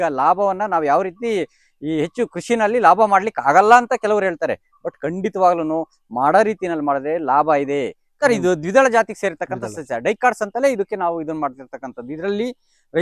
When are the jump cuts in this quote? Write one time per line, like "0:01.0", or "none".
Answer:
0:08.0

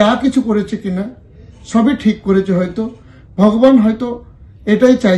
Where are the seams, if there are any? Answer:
none

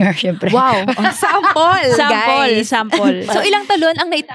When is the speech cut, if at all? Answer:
0:03.3

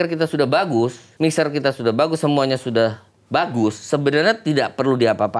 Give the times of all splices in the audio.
none

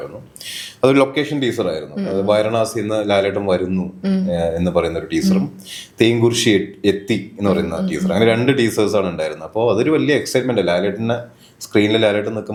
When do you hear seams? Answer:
none

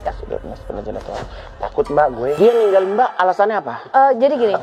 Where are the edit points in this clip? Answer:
0:02.4

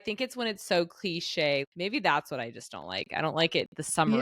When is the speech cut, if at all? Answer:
0:01.7

